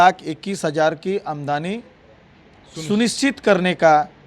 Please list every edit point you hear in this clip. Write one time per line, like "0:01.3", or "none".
none